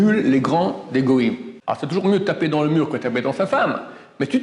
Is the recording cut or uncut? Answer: cut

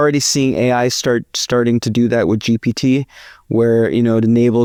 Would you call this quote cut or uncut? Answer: uncut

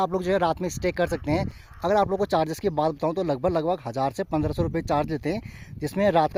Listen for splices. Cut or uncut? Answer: uncut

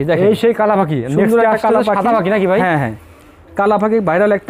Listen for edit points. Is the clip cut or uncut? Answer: uncut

